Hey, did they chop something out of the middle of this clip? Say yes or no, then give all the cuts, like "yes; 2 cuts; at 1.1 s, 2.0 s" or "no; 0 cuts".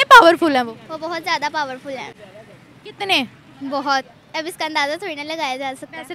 no; 0 cuts